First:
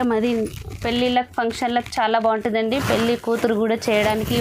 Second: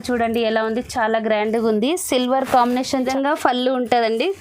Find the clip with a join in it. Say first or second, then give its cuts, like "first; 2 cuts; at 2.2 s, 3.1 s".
second; 1 cut; at 3.0 s